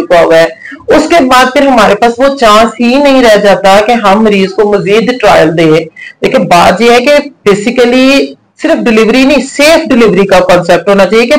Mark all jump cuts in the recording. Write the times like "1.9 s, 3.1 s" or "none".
none